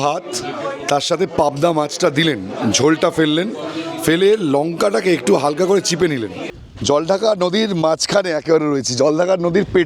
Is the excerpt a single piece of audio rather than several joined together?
no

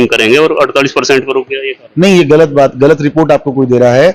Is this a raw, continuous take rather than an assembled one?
yes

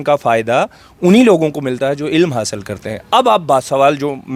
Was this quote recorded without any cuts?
yes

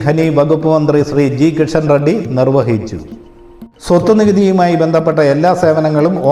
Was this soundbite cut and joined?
yes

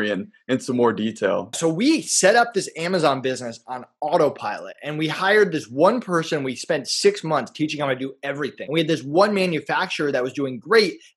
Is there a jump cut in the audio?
yes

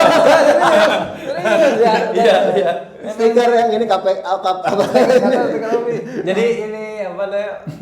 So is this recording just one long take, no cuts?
yes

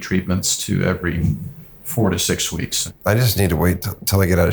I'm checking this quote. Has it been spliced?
yes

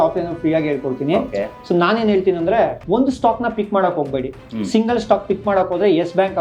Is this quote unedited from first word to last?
no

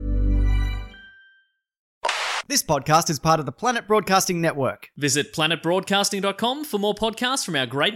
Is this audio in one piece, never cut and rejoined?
no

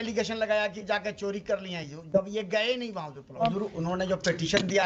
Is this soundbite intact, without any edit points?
no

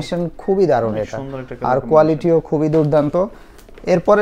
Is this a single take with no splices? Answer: yes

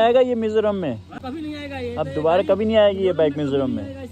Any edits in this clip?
yes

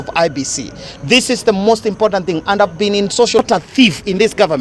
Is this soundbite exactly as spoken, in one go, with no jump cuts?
no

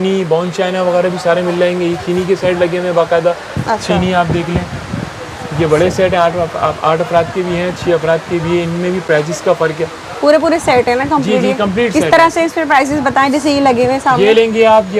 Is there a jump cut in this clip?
no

